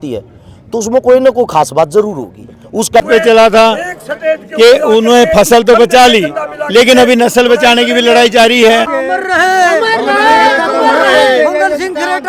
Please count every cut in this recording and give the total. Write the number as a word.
two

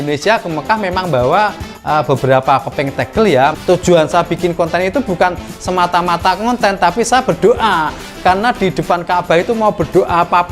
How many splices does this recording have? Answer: one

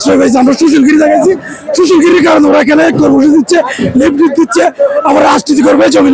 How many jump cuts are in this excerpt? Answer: zero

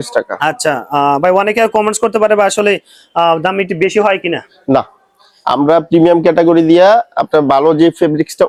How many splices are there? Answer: zero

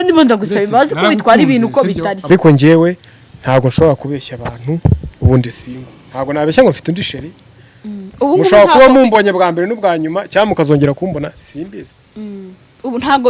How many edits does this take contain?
one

